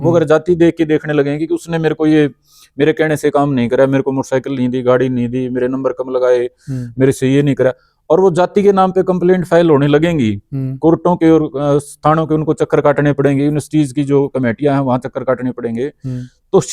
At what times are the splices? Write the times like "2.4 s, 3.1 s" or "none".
none